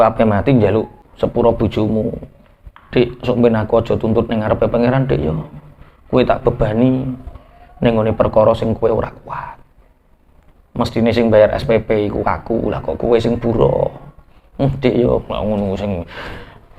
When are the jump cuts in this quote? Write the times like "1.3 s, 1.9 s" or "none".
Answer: 1.0 s